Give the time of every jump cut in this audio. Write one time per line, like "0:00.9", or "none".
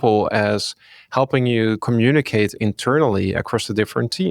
0:01.8